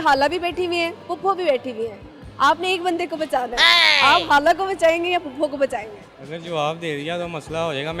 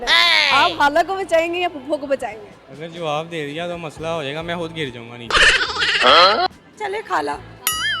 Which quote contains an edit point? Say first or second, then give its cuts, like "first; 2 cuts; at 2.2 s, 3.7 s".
second; 1 cut; at 6.5 s